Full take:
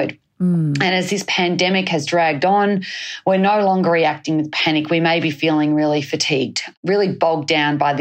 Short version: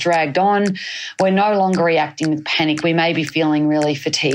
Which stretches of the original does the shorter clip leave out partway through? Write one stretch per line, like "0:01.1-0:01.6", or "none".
none